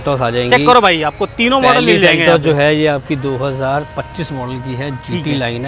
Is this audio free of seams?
yes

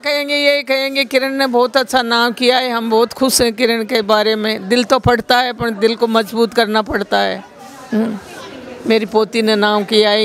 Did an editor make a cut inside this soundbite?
no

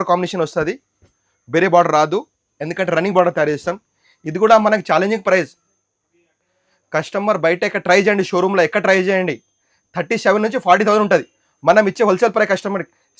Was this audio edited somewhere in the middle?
no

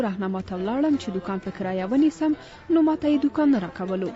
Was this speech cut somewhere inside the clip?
no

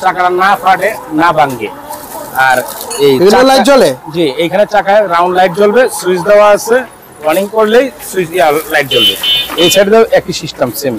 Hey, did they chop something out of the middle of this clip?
no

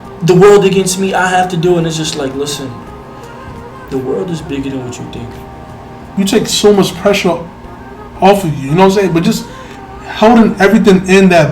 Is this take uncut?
no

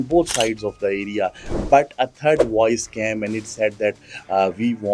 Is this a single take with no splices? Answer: yes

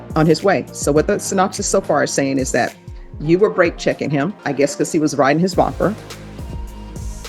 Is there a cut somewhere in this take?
no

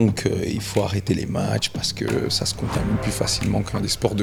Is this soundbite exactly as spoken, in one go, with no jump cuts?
yes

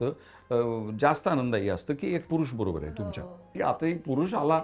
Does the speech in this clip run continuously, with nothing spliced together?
no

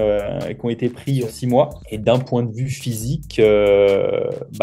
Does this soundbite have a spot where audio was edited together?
no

